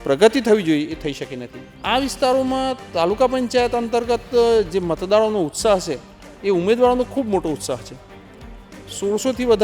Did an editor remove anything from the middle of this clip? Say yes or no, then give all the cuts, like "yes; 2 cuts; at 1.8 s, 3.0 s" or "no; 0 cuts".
yes; 1 cut; at 1.8 s